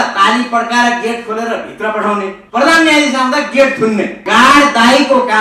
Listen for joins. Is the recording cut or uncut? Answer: cut